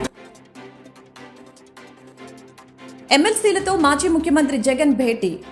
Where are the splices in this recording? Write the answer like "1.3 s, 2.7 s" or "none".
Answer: 1.5 s

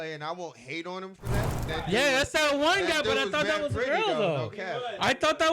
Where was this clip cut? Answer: 1.5 s

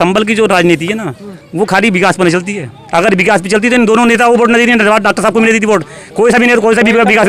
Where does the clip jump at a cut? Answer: none

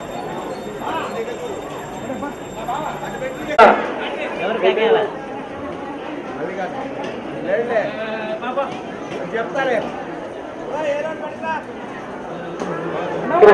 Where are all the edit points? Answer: 3.6 s

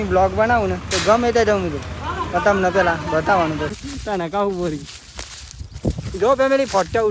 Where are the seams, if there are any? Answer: 3.7 s

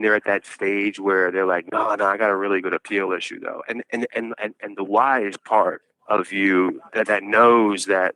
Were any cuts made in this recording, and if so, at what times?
5.9 s, 6.8 s

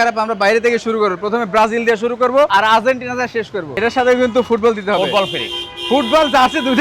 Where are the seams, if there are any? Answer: 3.6 s

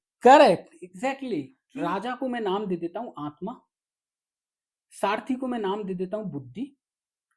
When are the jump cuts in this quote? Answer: 1.6 s

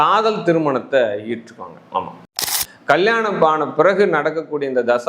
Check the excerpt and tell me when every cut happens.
2.4 s

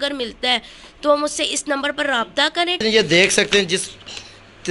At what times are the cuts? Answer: 2.8 s

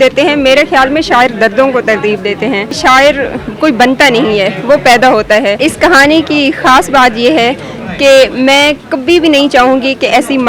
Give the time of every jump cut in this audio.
2.7 s, 5.6 s

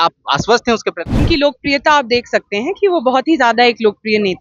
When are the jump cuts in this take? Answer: 1.2 s

